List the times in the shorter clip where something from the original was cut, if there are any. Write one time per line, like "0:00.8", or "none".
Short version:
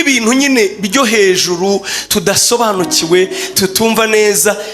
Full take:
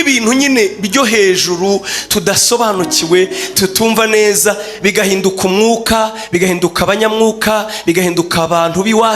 none